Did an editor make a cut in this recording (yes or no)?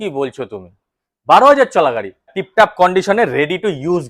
yes